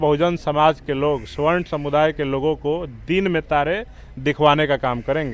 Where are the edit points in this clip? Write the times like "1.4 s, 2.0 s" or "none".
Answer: none